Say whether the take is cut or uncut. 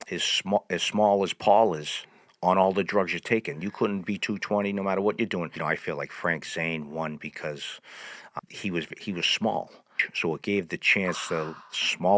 cut